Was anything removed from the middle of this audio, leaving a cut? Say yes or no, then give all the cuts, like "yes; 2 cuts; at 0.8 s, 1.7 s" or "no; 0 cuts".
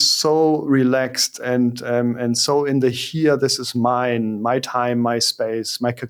no; 0 cuts